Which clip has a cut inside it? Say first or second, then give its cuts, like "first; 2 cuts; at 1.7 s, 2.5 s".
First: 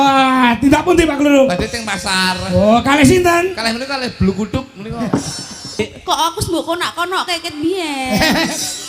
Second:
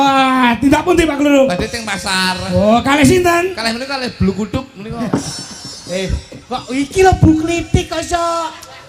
first; 1 cut; at 5.8 s